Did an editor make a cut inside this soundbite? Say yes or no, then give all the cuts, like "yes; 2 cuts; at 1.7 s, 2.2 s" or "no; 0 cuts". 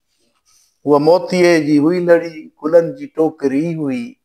no; 0 cuts